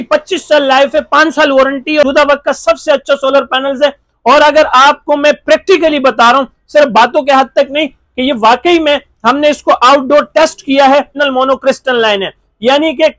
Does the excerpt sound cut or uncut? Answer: cut